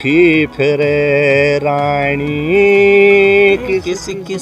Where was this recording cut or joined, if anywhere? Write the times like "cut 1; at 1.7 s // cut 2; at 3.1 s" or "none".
none